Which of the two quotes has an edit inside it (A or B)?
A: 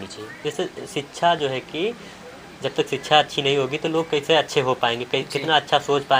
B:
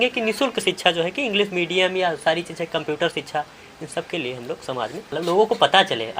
B